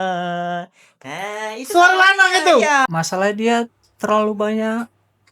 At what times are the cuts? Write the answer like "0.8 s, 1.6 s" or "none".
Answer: 2.9 s